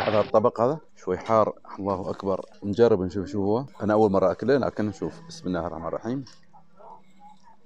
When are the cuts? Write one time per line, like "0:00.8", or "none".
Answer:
0:00.9
0:02.5
0:03.7